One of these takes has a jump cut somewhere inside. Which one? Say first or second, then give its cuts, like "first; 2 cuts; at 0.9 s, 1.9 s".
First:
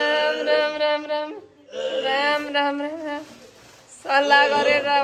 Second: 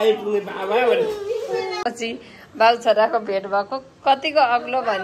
second; 1 cut; at 1.8 s